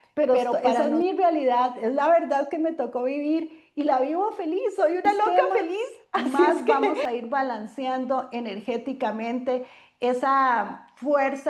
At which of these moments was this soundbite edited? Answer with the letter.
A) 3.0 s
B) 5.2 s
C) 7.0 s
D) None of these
C